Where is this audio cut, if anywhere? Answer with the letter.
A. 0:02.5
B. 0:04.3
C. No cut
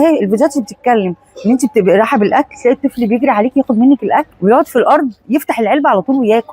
B